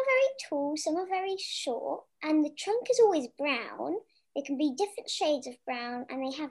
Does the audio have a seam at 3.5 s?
no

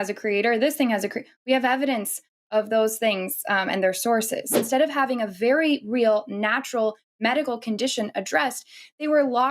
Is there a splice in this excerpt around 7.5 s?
no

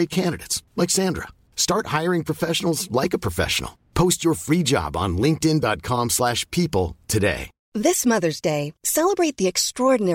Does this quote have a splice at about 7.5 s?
yes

